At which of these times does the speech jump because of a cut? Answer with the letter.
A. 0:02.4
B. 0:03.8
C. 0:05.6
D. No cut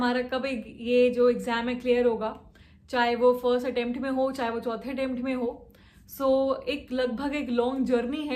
D